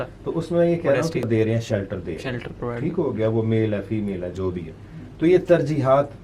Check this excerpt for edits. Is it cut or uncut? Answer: cut